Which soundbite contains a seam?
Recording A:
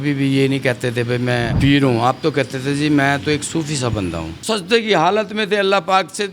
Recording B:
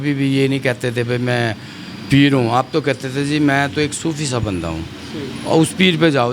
A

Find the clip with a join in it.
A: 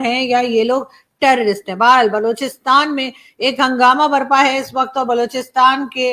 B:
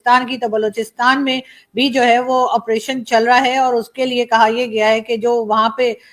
A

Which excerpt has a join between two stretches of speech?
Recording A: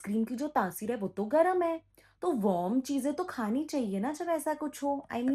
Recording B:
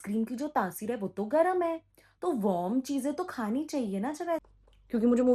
B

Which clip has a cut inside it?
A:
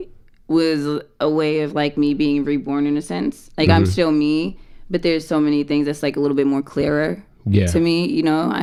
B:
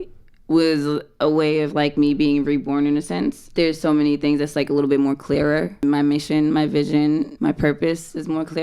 B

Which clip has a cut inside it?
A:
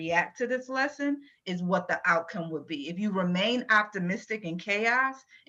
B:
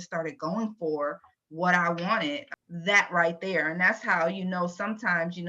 B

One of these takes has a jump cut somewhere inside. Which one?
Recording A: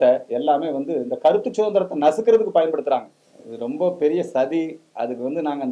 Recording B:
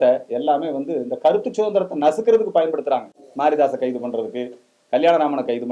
A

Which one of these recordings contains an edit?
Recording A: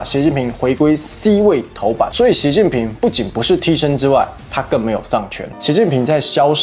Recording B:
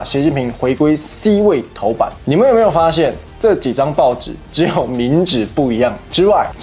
A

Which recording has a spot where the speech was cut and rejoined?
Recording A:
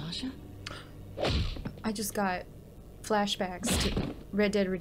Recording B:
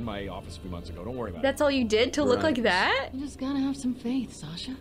B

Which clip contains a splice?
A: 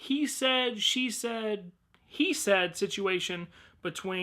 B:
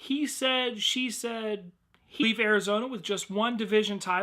A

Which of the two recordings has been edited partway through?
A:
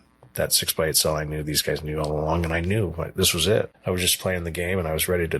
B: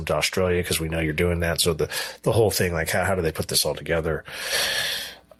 A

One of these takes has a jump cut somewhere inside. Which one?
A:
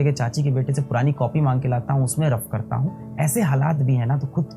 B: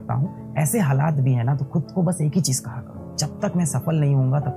B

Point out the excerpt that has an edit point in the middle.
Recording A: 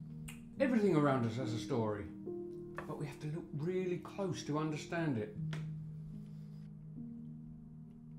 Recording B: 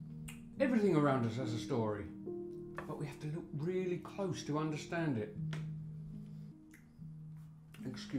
B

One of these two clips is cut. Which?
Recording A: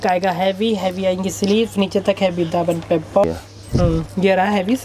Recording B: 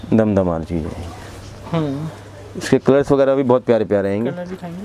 A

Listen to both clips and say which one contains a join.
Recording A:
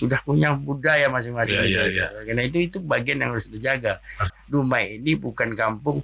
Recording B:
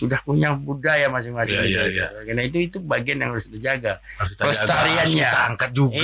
A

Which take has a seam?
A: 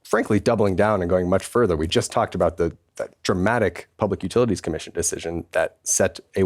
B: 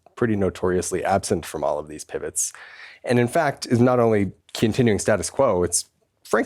B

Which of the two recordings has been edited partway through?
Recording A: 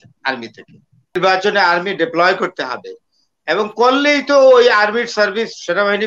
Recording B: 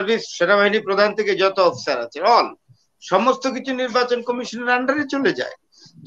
A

